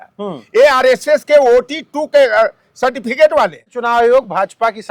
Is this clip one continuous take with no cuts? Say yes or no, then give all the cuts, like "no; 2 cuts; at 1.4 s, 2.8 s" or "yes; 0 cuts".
no; 1 cut; at 3.8 s